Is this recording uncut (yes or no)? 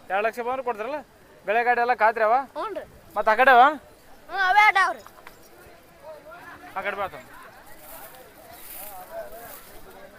yes